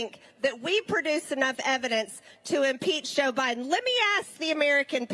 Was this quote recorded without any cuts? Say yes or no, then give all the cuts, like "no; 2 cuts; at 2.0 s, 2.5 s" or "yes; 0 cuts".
yes; 0 cuts